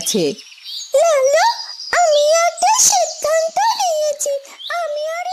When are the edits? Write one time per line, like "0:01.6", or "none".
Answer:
none